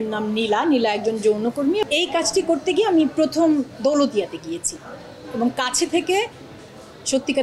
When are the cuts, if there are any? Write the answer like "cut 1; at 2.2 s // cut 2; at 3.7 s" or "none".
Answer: cut 1; at 1.8 s